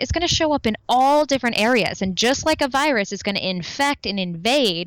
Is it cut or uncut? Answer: uncut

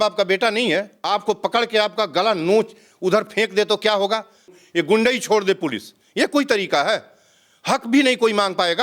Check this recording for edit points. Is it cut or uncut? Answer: cut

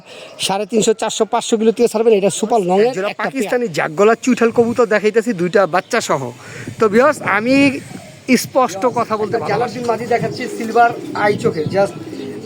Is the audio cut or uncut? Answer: cut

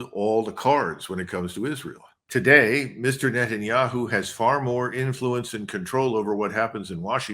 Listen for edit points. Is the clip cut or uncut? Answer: cut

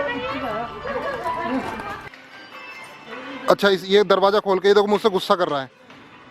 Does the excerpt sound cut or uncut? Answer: cut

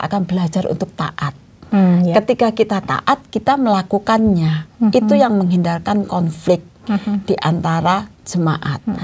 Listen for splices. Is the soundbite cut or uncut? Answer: uncut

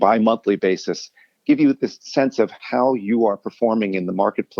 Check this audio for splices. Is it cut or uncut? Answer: uncut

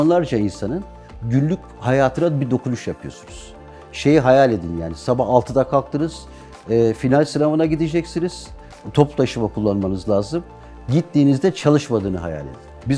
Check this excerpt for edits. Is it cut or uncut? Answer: uncut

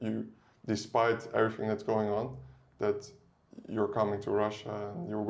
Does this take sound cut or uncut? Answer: uncut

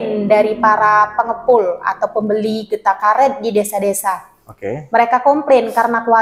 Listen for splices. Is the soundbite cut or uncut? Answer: uncut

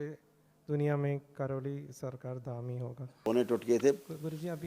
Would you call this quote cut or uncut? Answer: cut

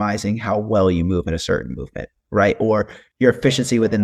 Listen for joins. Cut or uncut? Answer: cut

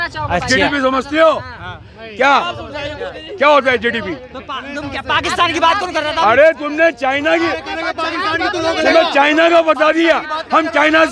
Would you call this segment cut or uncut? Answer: uncut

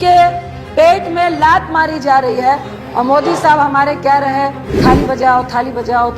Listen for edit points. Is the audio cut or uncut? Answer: cut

